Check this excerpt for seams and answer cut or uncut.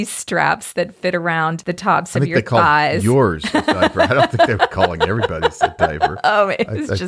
cut